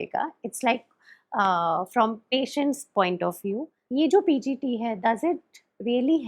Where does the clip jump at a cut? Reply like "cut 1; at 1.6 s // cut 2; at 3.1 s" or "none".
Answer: cut 1; at 3.7 s